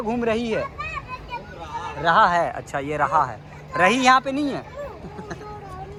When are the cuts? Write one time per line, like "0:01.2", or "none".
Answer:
none